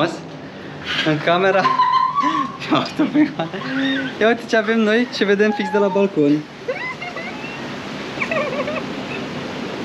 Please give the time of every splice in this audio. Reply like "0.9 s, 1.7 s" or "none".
none